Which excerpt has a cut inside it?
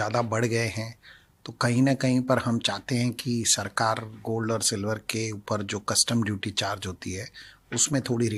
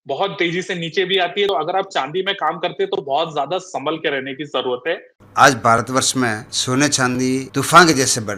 second; 4 cuts; at 1.5 s, 5.1 s, 6.5 s, 7.5 s

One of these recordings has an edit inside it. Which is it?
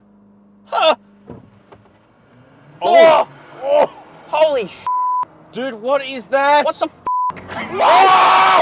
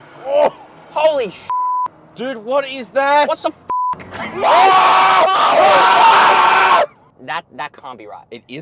second; 1 cut; at 7.1 s

